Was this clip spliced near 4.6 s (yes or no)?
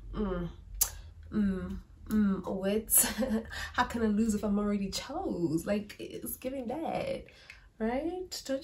no